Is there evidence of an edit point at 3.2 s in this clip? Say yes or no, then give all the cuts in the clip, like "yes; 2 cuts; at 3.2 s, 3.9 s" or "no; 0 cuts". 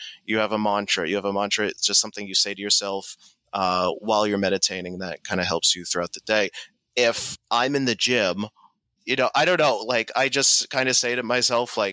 no; 2 cuts; at 7.3 s, 8.9 s